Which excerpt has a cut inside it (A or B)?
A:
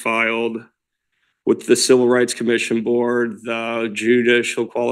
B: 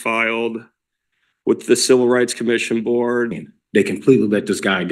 B